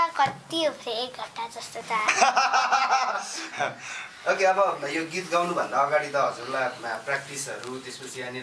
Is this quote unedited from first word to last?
yes; 0 cuts

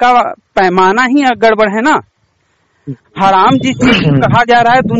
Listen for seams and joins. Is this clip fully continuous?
yes; 0 cuts

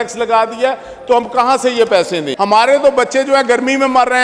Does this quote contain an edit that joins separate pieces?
yes; 1 cut; at 2.3 s

